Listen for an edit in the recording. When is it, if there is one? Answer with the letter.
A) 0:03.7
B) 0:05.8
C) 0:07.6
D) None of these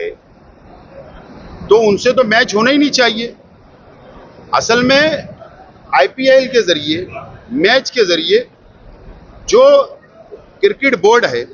D